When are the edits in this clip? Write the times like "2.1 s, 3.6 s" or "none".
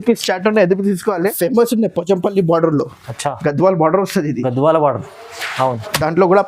1.5 s